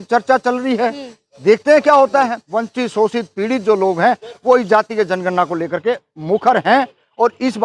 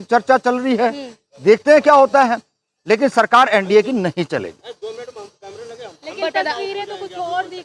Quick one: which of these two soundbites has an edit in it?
first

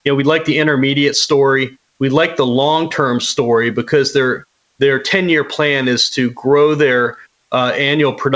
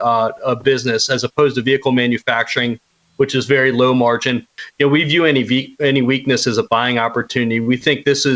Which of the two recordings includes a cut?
second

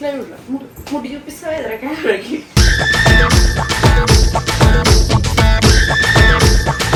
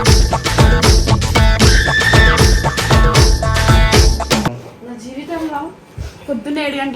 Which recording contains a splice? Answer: second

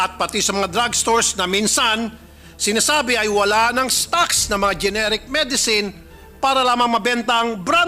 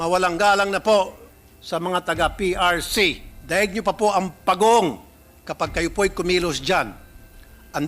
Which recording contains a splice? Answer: second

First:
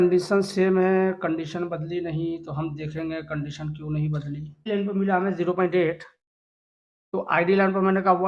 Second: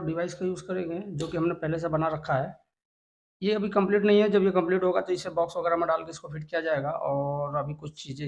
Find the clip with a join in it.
first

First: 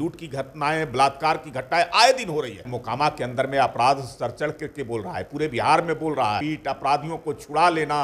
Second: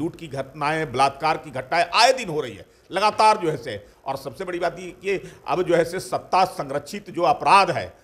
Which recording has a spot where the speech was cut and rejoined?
first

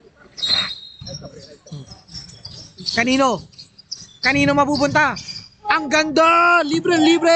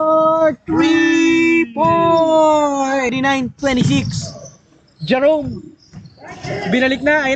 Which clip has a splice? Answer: second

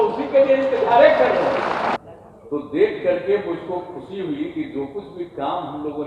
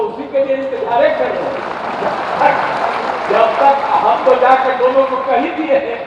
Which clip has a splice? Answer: first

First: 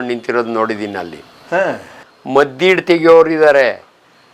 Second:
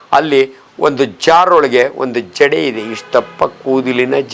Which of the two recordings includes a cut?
first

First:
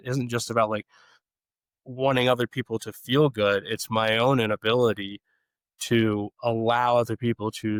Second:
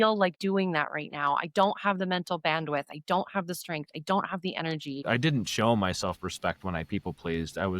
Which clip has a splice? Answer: second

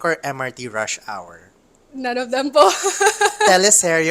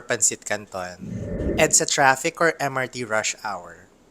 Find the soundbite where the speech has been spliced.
second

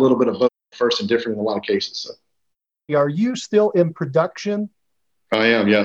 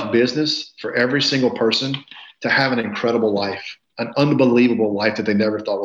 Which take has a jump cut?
first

